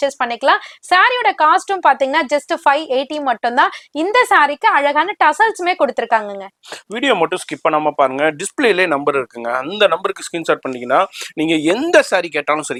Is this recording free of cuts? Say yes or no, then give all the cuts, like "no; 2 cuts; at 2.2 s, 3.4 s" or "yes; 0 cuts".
yes; 0 cuts